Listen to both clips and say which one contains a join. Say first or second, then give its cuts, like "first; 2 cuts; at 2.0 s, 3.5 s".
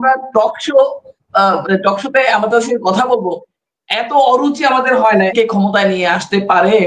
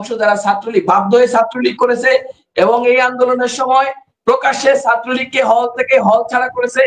first; 1 cut; at 5.3 s